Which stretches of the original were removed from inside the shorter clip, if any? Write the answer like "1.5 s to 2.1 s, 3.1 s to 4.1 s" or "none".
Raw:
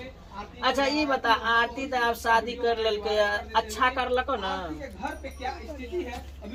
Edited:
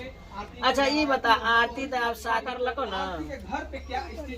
2.5 s to 4.0 s